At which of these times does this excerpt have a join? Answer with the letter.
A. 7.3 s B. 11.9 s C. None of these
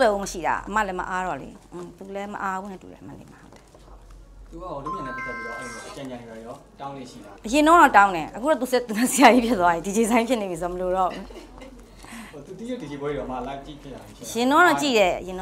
A